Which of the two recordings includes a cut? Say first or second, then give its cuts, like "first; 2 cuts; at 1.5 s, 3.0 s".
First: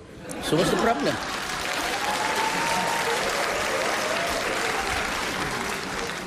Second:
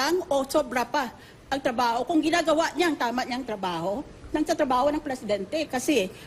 second; 1 cut; at 4.2 s